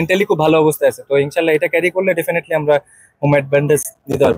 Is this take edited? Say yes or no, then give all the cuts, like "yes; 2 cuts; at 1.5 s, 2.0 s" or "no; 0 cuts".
no; 0 cuts